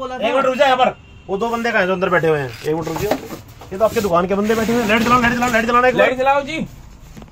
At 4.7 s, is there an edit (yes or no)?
no